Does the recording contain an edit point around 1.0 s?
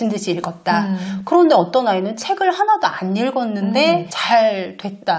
no; 0 cuts

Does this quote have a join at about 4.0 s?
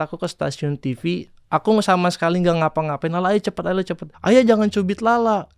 yes; 1 cut; at 4.0 s

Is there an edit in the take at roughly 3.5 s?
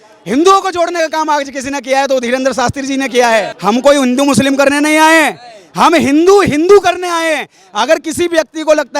yes; 1 cut; at 3.5 s

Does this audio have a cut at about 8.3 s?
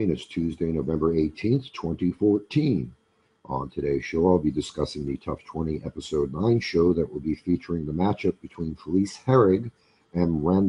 yes; 1 cut; at 8.3 s

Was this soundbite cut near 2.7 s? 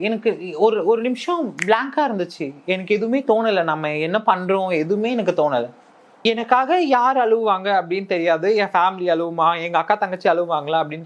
no; 1 cut; at 6.2 s

